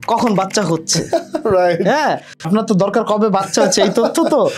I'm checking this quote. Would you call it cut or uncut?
cut